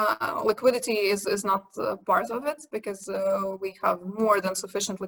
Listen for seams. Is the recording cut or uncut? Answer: uncut